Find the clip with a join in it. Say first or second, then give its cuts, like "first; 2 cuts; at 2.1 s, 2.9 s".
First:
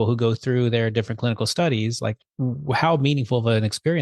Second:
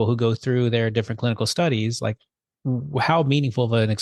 first; 1 cut; at 2.3 s